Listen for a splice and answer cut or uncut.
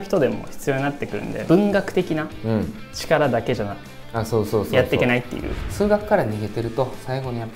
cut